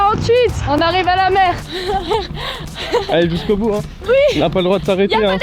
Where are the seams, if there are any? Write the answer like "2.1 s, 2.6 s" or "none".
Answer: 1.7 s